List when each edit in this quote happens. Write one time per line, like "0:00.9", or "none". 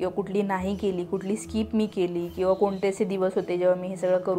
none